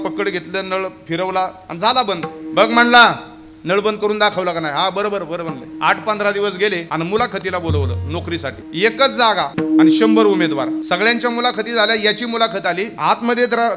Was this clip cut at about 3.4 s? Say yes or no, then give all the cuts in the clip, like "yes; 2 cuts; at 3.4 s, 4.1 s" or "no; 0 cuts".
no; 6 cuts; at 5.6 s, 6.8 s, 8.6 s, 9.5 s, 10.8 s, 12.9 s